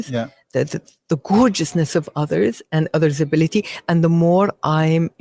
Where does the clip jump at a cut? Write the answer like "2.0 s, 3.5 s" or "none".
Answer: none